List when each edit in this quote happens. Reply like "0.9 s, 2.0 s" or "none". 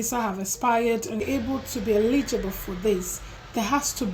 1.2 s